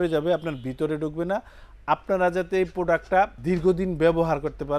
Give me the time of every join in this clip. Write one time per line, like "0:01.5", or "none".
0:03.4